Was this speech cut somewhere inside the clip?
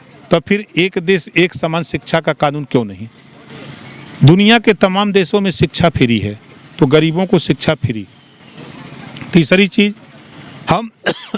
no; 0 cuts

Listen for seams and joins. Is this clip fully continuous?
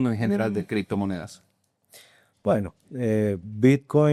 yes; 0 cuts

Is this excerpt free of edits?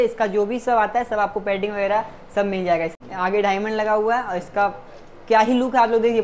no; 1 cut; at 3.0 s

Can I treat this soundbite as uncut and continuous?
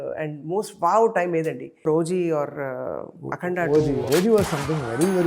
no; 2 cuts; at 1.9 s, 4.0 s

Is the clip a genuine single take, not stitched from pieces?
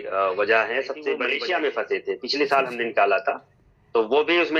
no; 1 cut; at 1.3 s

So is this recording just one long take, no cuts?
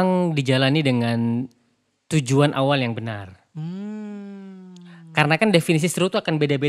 yes; 0 cuts

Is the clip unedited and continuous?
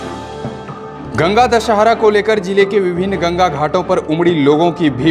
no; 1 cut; at 1.0 s

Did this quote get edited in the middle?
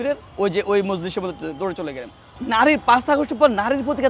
yes; 1 cut; at 2.3 s

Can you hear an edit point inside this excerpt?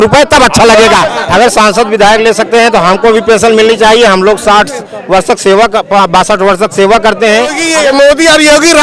yes; 2 cuts; at 1.1 s, 7.6 s

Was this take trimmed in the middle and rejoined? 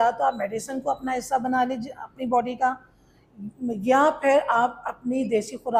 no; 0 cuts

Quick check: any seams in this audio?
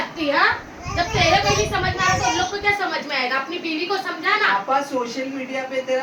no; 0 cuts

